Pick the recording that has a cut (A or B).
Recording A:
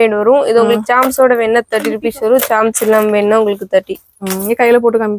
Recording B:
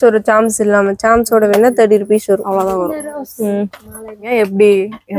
B